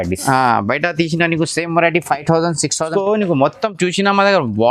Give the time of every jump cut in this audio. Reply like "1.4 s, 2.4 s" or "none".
2.9 s